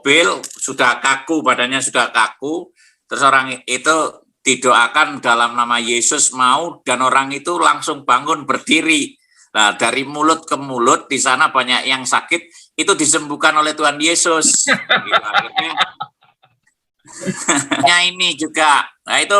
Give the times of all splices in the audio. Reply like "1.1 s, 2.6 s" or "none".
17.8 s